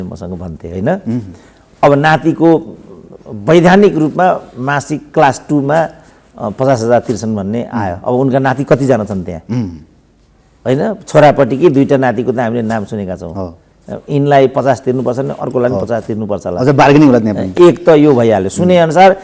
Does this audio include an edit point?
no; 0 cuts

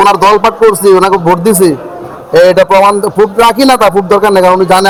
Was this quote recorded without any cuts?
yes; 0 cuts

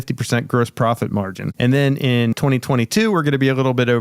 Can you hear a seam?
yes; 2 cuts; at 1.4 s, 2.3 s

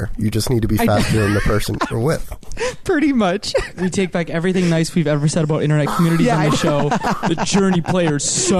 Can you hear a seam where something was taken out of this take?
no; 0 cuts

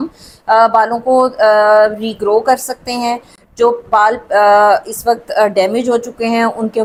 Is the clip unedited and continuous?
yes; 0 cuts

